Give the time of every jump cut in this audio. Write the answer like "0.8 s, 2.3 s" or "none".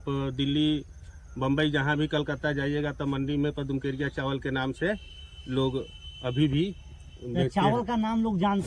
none